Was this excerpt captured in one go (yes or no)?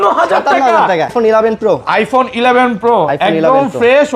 no